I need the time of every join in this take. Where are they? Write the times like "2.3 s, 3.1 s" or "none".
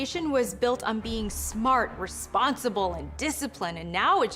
none